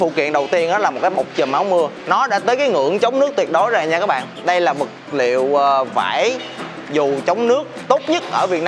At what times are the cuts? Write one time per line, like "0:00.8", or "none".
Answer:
0:02.0